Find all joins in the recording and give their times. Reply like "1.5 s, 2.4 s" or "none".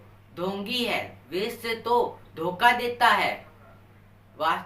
1.2 s